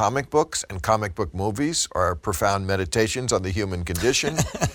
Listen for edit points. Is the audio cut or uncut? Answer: uncut